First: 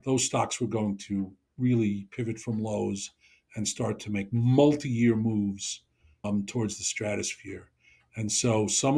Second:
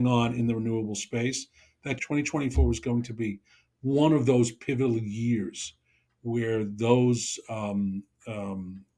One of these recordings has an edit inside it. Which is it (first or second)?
first